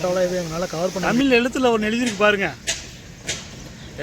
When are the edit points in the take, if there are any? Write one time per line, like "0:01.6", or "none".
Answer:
0:01.0